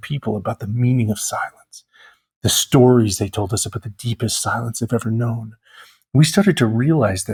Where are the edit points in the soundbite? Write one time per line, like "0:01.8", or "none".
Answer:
none